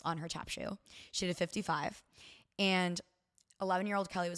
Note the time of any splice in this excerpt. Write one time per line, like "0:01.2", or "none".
none